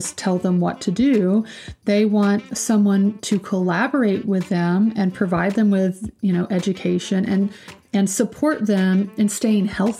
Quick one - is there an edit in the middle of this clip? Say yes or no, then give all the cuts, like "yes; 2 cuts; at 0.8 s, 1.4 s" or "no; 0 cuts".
yes; 2 cuts; at 2.4 s, 9.1 s